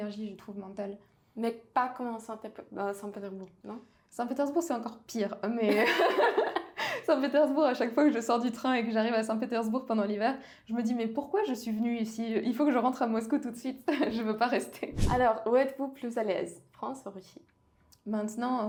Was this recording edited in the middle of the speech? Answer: no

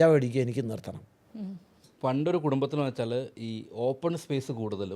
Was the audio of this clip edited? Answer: yes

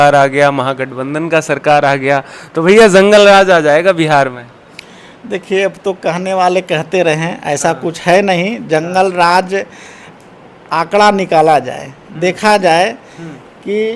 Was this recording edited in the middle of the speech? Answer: no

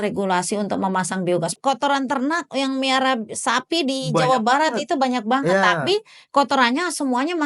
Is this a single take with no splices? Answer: no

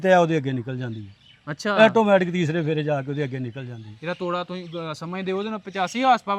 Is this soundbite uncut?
yes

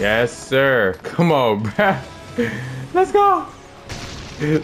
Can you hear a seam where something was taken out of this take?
yes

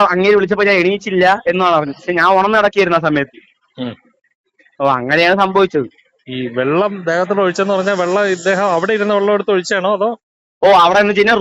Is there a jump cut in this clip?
no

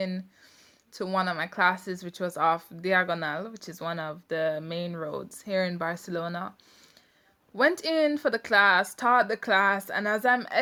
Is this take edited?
no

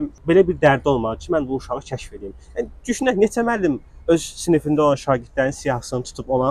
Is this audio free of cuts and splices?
yes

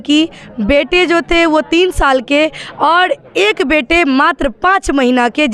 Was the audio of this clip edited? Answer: no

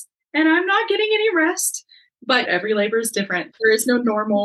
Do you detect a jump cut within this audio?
yes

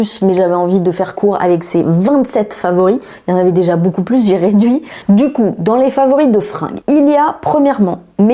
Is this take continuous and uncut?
yes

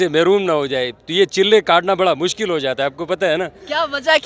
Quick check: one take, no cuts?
yes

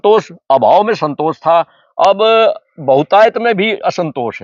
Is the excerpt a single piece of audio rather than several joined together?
yes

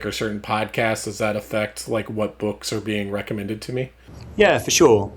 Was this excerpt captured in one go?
yes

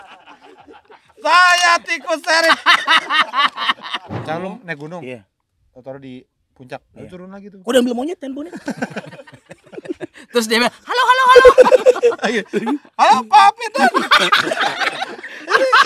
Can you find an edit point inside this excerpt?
yes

